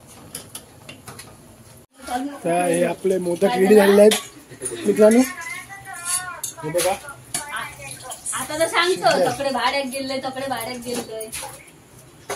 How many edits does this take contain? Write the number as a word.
one